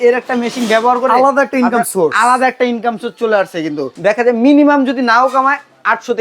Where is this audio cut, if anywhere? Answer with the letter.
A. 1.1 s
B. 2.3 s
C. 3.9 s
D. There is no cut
C